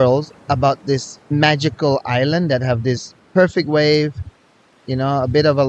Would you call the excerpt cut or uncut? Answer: cut